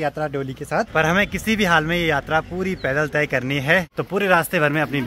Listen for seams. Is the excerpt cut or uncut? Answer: cut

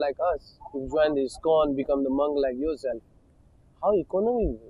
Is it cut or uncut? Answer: uncut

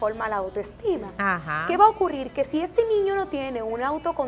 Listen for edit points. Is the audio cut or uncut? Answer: uncut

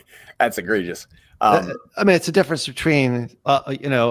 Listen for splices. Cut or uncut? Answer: uncut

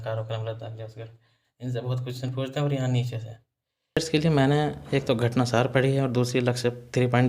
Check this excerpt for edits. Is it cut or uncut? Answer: cut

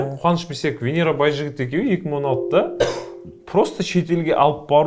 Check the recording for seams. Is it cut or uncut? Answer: uncut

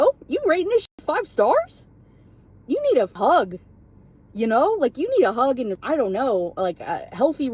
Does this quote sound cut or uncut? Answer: uncut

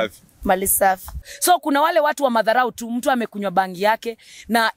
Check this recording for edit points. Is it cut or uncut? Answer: cut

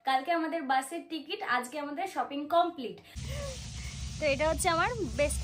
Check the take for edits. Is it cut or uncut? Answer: cut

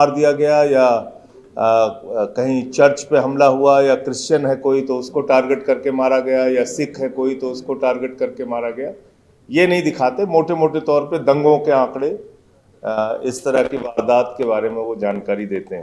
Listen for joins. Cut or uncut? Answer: uncut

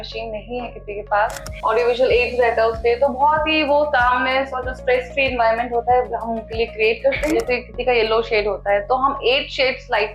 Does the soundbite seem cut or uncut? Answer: cut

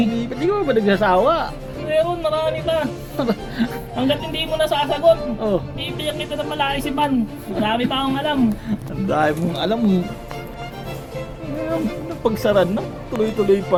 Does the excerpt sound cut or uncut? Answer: uncut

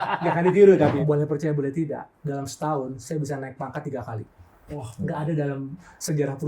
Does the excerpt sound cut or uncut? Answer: cut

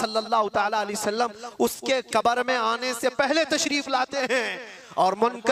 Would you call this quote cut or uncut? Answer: uncut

